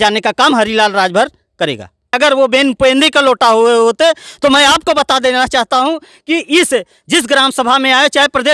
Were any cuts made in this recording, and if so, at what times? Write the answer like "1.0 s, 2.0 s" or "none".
2.2 s